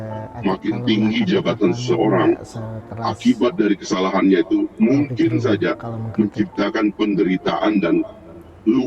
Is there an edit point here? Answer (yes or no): no